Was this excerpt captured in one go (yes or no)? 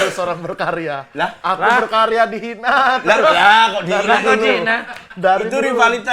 yes